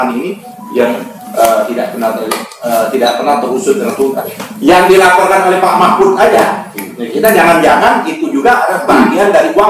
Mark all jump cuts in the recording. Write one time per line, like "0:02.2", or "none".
0:04.2